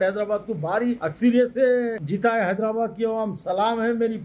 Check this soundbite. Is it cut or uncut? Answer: cut